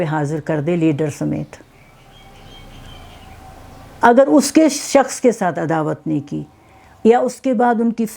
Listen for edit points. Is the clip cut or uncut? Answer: uncut